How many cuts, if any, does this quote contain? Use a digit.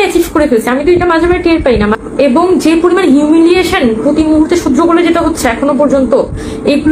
1